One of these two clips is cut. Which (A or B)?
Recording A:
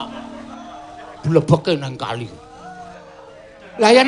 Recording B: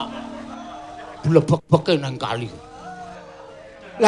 A